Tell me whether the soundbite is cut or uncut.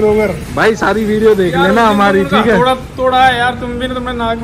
uncut